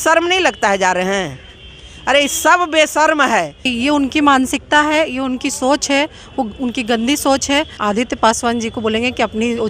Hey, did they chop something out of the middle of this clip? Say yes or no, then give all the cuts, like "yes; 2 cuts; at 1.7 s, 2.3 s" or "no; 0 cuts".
yes; 2 cuts; at 3.7 s, 7.7 s